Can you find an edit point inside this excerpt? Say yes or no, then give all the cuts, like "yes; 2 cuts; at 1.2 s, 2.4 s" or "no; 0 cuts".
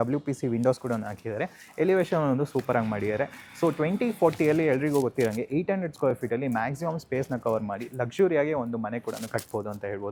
no; 0 cuts